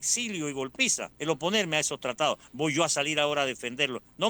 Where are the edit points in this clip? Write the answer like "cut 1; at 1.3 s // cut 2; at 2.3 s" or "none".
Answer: cut 1; at 1.1 s

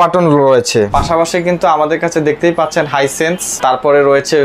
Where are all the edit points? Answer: cut 1; at 0.9 s // cut 2; at 3.5 s

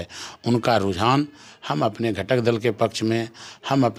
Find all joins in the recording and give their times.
none

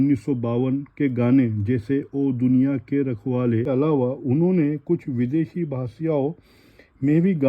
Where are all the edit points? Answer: cut 1; at 3.7 s

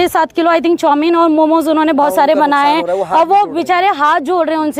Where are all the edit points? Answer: none

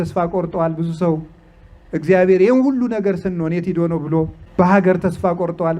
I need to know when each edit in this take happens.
cut 1; at 4.4 s

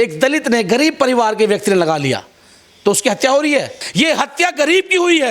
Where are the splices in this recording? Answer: cut 1; at 3.8 s

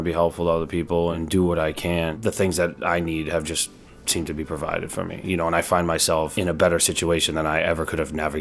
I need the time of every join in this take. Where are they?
cut 1; at 1.2 s // cut 2; at 2.1 s // cut 3; at 6.3 s

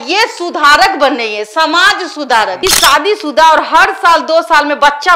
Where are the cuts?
cut 1; at 2.5 s

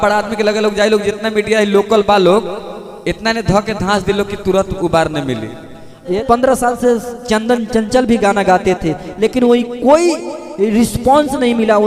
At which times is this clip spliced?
cut 1; at 6.1 s

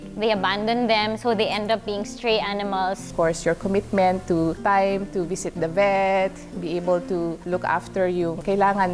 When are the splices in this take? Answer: cut 1; at 3.1 s // cut 2; at 4.6 s // cut 3; at 7.4 s

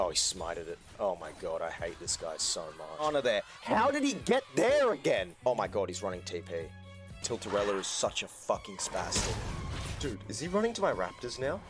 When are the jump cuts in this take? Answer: cut 1; at 3.0 s // cut 2; at 7.2 s // cut 3; at 10.0 s

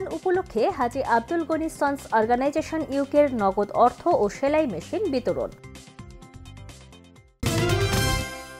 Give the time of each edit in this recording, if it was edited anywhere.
cut 1; at 7.4 s

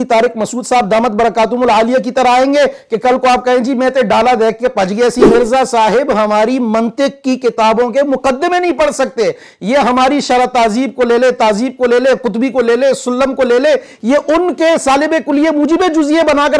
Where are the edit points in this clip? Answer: cut 1; at 5.3 s

